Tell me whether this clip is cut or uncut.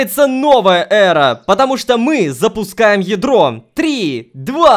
uncut